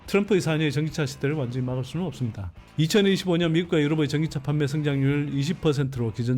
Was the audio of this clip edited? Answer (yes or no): yes